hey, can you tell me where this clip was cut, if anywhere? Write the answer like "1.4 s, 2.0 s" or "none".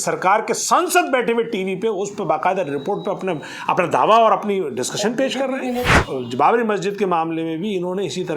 5.9 s